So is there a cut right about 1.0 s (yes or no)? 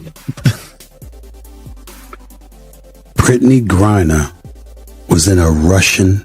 yes